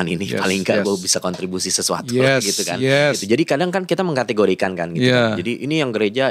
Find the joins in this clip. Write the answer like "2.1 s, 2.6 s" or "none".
3.2 s